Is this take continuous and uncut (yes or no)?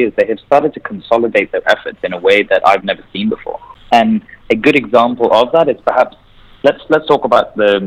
no